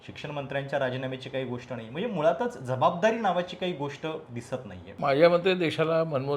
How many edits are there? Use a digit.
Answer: 1